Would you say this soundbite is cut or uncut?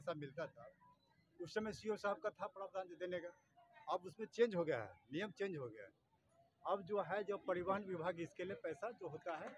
uncut